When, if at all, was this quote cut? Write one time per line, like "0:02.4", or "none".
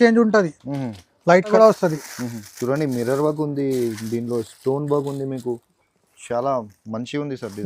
0:01.5